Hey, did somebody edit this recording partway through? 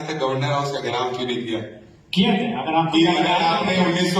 no; 0 cuts

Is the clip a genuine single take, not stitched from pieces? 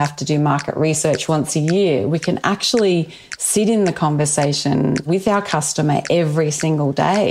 no; 2 cuts; at 1.2 s, 5.0 s

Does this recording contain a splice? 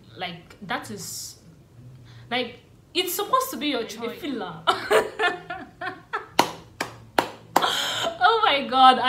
yes; 1 cut; at 4.0 s

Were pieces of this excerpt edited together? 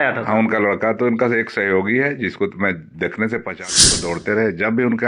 yes; 1 cut; at 3.8 s

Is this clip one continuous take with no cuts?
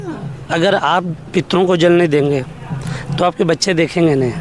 yes; 0 cuts

